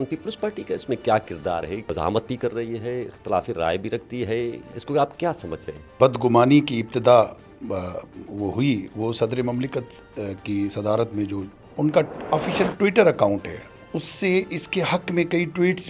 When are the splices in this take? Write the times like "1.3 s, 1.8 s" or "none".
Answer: 1.9 s, 4.8 s, 6.0 s, 11.6 s